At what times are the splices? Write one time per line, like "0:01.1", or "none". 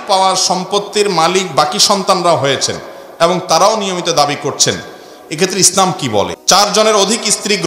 0:06.4